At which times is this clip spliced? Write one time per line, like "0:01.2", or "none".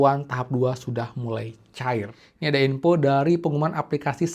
0:02.2